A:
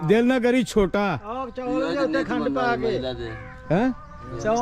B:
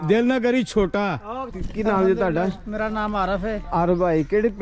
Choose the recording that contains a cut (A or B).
B